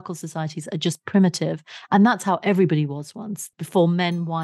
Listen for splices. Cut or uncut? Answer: cut